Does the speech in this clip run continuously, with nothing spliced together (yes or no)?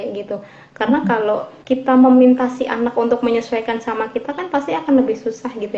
no